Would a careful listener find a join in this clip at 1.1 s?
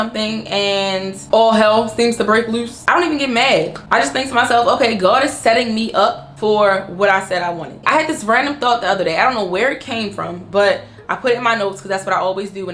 no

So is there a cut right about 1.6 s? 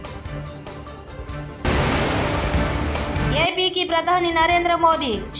yes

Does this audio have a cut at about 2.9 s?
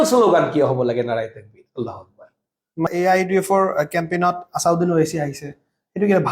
yes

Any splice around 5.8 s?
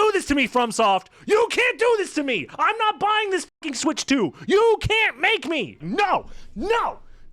yes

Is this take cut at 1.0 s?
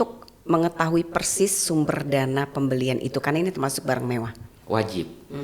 no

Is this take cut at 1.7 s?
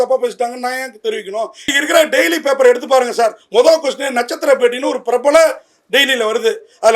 yes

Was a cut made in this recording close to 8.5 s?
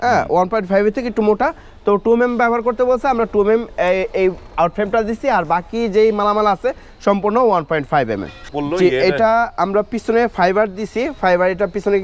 yes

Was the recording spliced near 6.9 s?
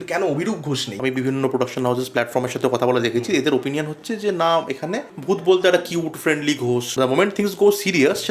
yes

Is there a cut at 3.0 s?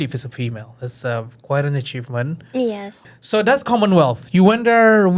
yes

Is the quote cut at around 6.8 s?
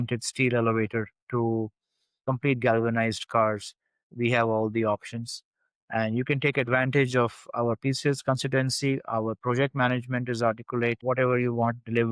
no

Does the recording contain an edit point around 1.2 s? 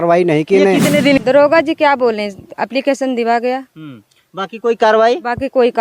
yes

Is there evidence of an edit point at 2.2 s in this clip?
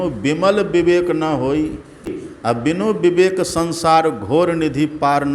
yes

